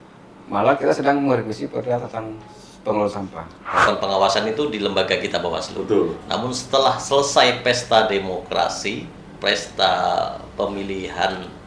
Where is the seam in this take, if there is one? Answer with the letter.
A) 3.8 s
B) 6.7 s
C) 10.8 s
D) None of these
A